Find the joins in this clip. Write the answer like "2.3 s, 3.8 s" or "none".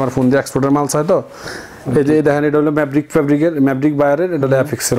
1.4 s